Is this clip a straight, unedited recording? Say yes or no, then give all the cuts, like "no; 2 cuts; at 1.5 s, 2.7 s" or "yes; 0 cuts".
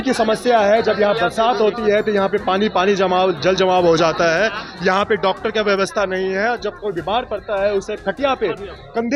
yes; 0 cuts